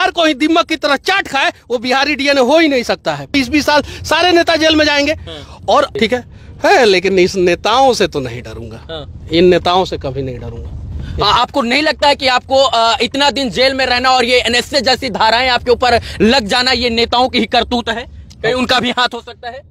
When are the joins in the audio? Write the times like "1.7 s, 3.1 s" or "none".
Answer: 3.3 s, 5.9 s